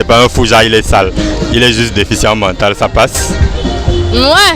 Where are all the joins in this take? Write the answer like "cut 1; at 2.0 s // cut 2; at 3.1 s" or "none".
none